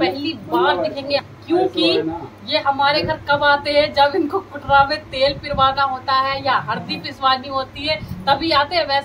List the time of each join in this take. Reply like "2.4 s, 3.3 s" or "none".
1.3 s